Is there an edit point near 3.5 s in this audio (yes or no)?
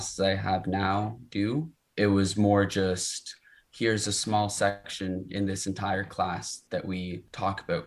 no